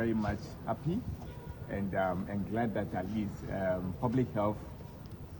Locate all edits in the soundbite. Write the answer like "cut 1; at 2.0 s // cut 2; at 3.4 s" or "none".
none